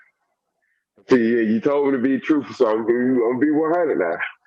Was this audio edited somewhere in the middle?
no; 0 cuts

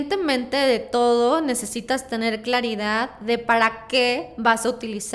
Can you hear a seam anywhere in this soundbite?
no; 0 cuts

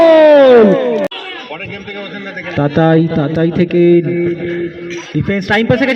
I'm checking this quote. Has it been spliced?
yes; 1 cut; at 1.1 s

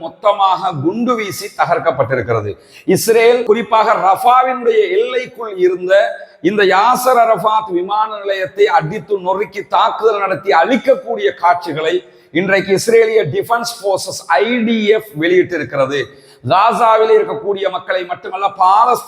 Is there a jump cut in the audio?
no; 0 cuts

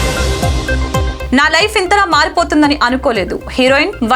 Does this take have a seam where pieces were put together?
yes; 1 cut; at 1.2 s

